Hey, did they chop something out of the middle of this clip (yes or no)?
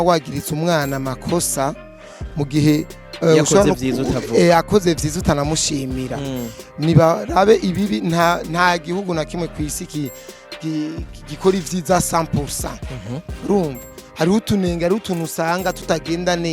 no